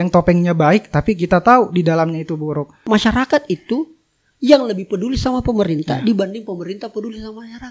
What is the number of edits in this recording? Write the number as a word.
one